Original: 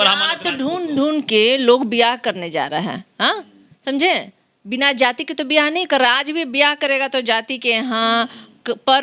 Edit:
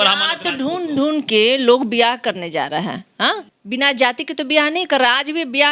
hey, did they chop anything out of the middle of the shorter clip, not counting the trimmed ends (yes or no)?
yes